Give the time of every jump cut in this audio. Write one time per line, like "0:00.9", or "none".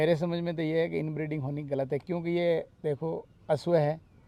none